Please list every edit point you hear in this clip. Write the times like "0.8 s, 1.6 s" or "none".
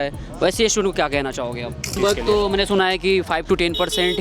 2.0 s